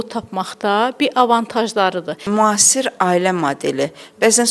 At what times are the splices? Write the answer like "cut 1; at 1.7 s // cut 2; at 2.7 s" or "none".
cut 1; at 2.1 s